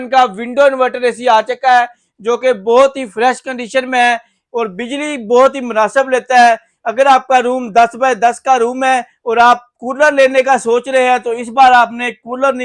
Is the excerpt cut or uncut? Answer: uncut